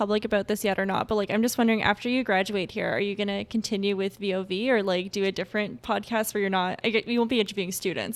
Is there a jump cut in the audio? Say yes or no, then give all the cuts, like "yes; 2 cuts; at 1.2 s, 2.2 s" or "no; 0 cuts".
no; 0 cuts